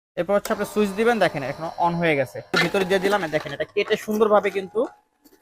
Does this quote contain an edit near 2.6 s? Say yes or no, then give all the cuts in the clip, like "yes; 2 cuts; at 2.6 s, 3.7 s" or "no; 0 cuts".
yes; 1 cut; at 2.6 s